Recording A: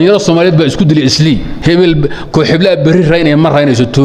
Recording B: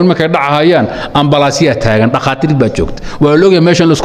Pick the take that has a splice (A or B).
A